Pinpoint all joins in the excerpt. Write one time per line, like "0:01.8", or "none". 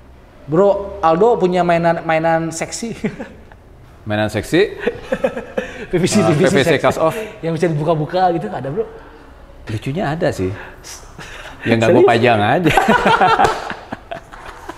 none